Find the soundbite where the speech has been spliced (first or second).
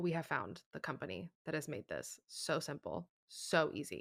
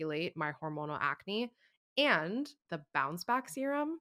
second